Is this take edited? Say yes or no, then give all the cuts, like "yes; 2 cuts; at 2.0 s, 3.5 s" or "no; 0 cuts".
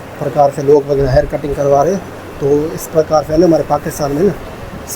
no; 0 cuts